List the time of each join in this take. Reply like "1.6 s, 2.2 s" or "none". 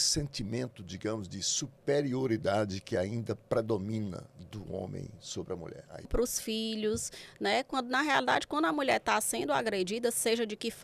6.1 s